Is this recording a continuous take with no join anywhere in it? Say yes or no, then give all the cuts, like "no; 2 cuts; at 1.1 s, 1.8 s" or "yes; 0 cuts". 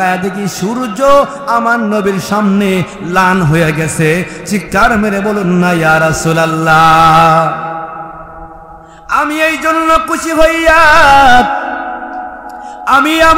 yes; 0 cuts